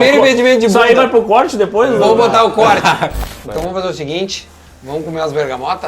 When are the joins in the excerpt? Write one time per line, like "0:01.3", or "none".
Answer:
0:03.1